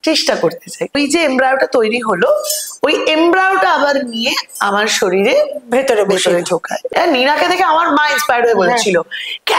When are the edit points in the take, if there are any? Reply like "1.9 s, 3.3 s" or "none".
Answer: 1.0 s, 6.9 s